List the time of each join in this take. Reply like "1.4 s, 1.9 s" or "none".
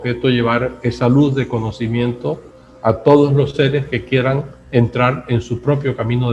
none